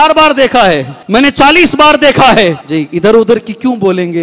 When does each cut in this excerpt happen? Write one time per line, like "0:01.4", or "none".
0:00.9
0:02.6